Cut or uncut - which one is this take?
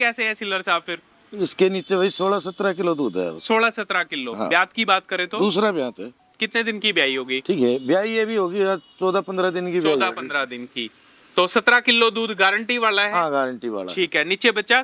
uncut